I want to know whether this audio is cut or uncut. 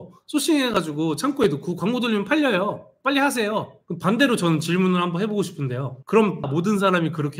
cut